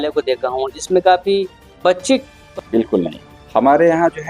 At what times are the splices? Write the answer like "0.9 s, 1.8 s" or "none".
2.7 s